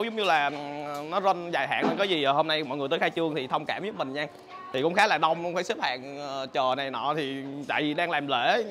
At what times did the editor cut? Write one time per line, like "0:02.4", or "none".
none